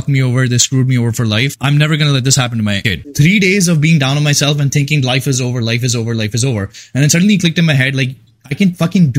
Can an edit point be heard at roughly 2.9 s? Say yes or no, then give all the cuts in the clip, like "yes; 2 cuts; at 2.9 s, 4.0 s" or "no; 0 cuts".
yes; 2 cuts; at 1.5 s, 2.9 s